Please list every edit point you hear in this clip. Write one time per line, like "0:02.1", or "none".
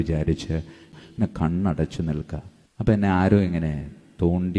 0:00.9